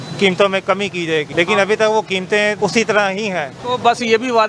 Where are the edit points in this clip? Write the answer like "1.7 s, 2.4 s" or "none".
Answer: 1.3 s, 2.6 s, 3.5 s